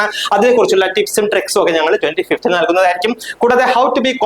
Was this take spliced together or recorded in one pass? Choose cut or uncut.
uncut